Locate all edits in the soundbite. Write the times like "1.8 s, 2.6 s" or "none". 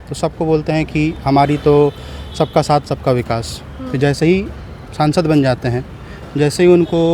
none